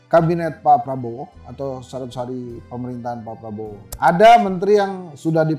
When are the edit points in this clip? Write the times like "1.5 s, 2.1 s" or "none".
3.9 s